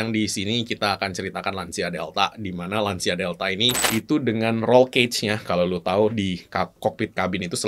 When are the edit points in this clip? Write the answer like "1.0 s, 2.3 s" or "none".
3.7 s